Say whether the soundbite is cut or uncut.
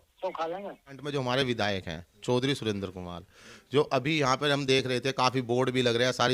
cut